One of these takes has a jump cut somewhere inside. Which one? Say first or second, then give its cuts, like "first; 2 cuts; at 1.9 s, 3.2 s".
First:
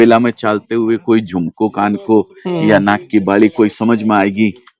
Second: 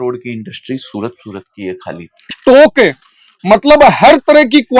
second; 1 cut; at 2.3 s